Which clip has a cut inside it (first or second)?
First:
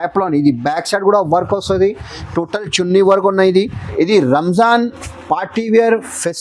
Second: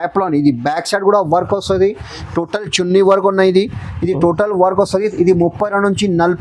first